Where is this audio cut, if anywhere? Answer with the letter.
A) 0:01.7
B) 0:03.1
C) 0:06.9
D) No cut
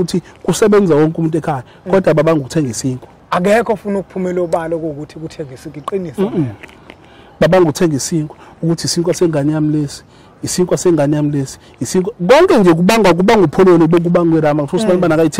B